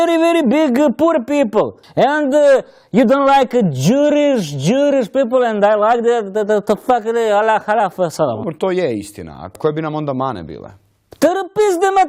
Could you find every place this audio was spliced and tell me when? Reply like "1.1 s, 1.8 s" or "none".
1.8 s